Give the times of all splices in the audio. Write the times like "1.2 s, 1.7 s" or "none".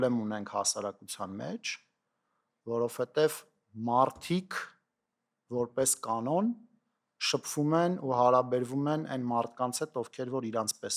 none